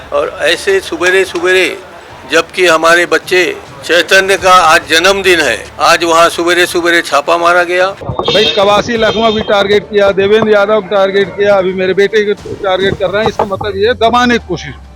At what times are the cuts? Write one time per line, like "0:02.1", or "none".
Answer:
0:05.7
0:08.1

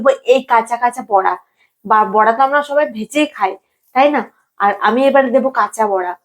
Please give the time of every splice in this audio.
none

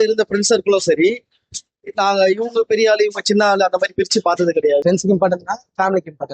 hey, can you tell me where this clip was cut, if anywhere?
0:04.8

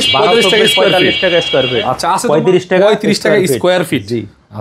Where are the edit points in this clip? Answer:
0:02.2

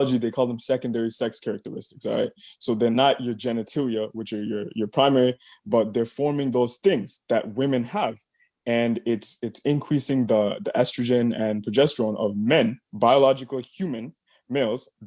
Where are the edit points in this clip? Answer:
none

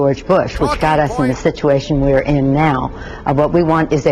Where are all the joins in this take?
0:01.0
0:03.3

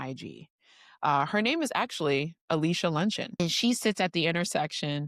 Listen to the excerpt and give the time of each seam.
0:03.4

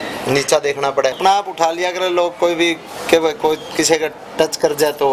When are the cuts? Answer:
0:01.2

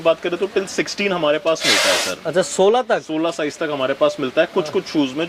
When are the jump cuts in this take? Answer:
none

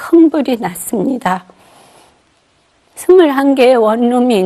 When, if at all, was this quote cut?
none

